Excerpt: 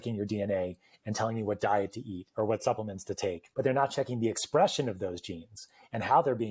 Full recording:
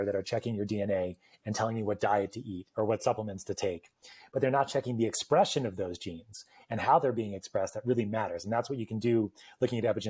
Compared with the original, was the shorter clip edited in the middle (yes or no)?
yes